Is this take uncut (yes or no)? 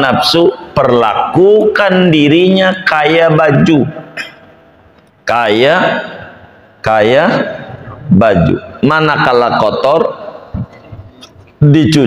yes